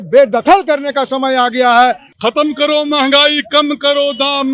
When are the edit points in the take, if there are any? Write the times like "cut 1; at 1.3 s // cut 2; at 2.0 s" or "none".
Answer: cut 1; at 2.1 s